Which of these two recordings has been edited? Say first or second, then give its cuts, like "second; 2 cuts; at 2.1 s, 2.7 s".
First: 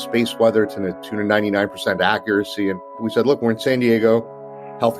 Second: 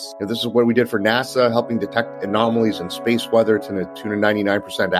first; 1 cut; at 3.0 s